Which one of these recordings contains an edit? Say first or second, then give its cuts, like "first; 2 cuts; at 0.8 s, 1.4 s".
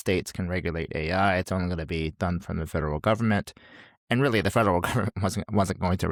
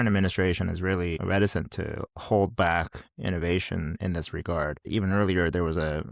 second; 2 cuts; at 1.2 s, 4.9 s